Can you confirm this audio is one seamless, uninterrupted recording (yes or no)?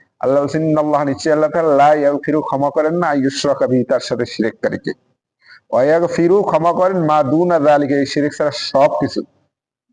yes